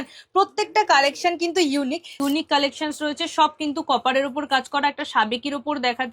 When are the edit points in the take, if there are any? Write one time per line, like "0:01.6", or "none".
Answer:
0:02.2